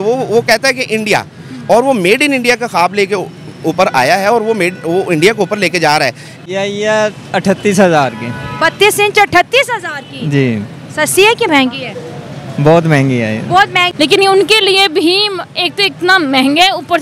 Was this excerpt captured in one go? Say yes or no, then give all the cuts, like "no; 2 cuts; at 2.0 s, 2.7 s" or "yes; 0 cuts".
no; 2 cuts; at 6.3 s, 13.8 s